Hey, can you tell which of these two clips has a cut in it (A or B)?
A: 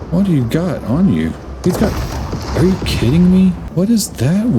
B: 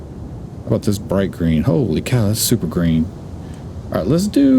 A